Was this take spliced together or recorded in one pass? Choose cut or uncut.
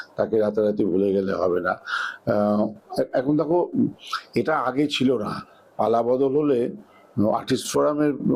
uncut